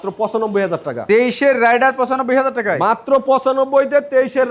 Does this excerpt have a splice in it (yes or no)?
no